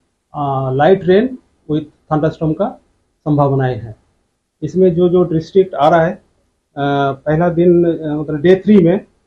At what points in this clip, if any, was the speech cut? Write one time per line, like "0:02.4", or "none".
none